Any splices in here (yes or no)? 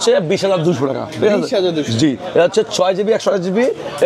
no